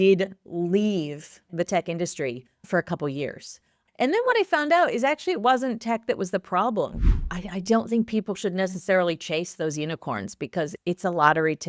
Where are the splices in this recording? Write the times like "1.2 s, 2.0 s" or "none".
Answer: 3.8 s, 7.2 s